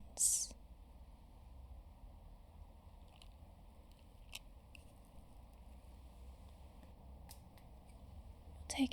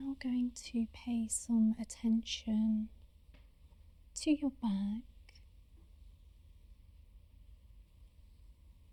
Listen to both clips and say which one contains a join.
first; 1 cut; at 6.9 s

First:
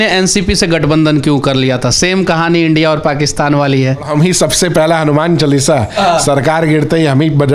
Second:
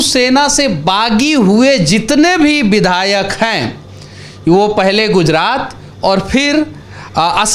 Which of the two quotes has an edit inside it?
first; 1 cut; at 4.1 s

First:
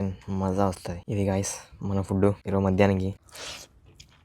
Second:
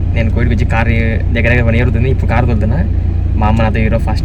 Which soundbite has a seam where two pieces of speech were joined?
first; 3 cuts; at 0.9 s, 2.4 s, 3.3 s

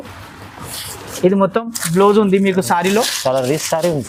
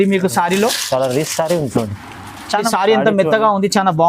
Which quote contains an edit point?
second; 1 cut; at 2.7 s

